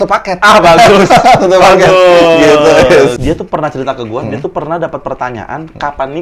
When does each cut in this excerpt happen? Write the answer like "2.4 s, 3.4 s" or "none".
3.2 s